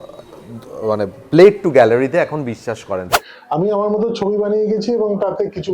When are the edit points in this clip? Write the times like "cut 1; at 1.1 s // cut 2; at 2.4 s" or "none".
cut 1; at 3.1 s